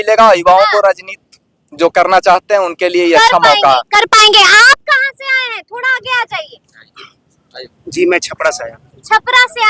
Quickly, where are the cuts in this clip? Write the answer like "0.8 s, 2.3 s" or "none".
none